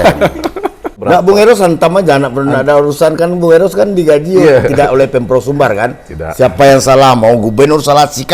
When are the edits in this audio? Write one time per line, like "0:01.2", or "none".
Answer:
0:01.0